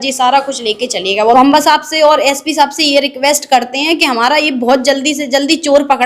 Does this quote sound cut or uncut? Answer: cut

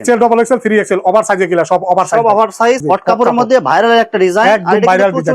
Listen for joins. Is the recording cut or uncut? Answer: cut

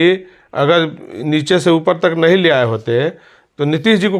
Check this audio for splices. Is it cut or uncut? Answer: uncut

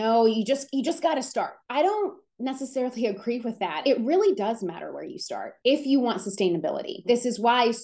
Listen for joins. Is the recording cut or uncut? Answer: cut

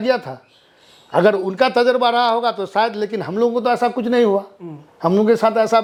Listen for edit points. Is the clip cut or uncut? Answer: uncut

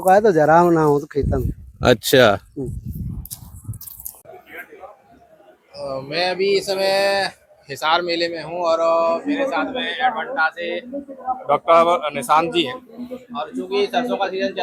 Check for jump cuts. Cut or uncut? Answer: uncut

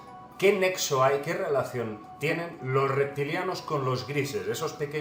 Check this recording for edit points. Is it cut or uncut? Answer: uncut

